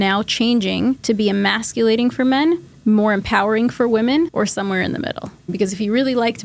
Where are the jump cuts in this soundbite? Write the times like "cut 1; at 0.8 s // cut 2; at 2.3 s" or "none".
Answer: cut 1; at 1.0 s // cut 2; at 2.7 s // cut 3; at 4.3 s // cut 4; at 5.5 s